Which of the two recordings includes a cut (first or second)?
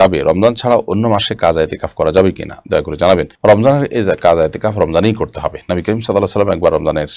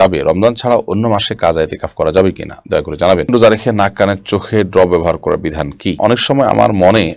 second